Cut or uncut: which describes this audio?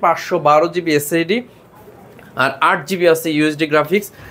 uncut